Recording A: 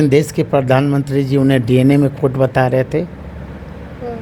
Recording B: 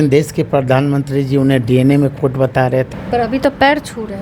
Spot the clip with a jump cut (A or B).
B